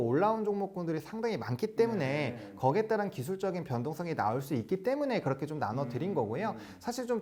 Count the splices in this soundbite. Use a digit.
0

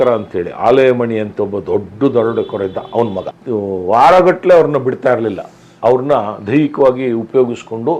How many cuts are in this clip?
1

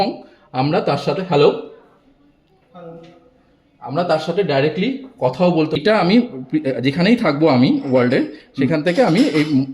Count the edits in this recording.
1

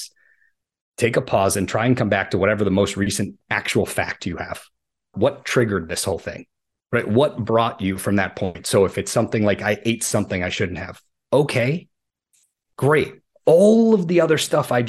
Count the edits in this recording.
1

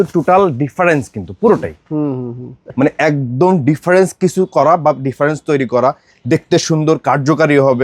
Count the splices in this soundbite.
1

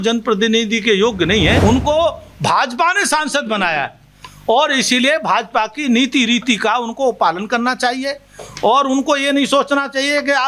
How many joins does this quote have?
1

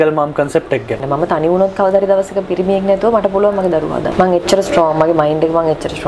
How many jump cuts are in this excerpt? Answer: 2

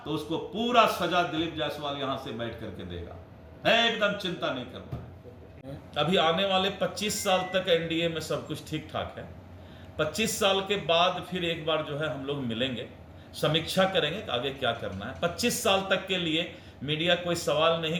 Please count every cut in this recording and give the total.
0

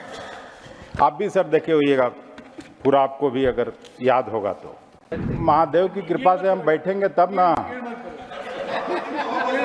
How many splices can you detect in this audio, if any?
1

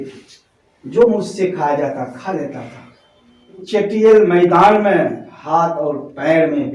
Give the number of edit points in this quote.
1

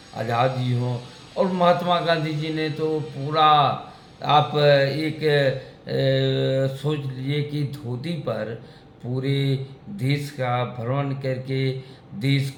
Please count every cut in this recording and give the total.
0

